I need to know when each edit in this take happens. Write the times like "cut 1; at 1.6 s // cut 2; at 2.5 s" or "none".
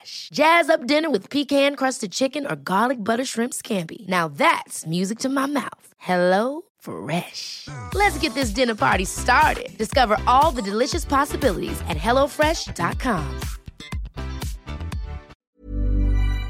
cut 1; at 15.3 s